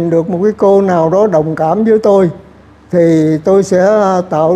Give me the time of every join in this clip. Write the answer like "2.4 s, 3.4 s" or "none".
none